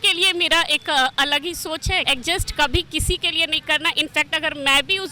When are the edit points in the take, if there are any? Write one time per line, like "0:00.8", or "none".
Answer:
0:02.0